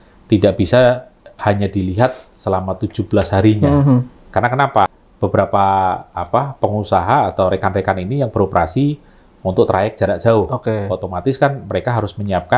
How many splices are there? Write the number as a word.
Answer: one